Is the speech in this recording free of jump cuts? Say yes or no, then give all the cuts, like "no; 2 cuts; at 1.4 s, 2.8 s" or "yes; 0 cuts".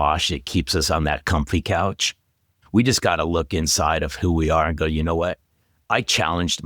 no; 1 cut; at 2.4 s